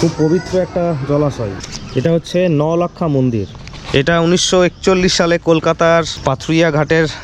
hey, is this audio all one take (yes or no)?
no